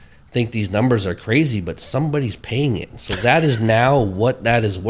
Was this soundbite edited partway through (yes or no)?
no